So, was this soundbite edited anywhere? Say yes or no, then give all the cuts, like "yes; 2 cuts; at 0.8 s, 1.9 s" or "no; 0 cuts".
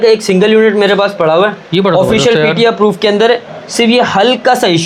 no; 0 cuts